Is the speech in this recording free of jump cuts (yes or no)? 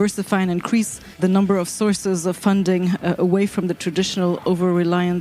no